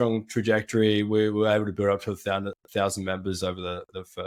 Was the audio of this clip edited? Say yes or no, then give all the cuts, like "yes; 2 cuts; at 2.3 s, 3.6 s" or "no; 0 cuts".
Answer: no; 0 cuts